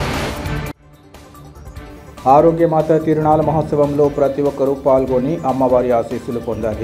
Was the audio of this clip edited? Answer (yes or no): yes